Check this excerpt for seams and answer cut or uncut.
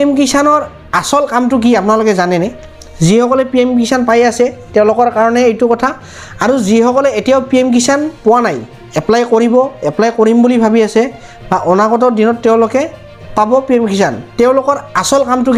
uncut